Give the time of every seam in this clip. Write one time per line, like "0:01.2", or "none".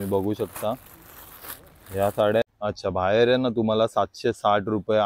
0:02.4